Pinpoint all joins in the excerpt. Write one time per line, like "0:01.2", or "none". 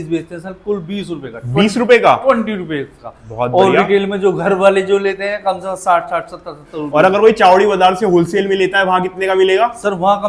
none